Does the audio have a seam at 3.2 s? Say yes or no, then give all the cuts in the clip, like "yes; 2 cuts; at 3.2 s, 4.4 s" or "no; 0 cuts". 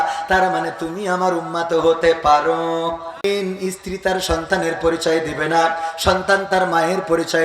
yes; 1 cut; at 3.2 s